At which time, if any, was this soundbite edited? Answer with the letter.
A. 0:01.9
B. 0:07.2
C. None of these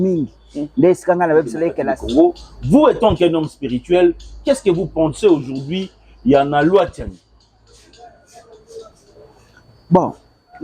A